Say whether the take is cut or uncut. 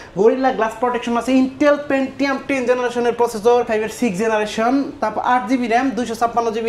cut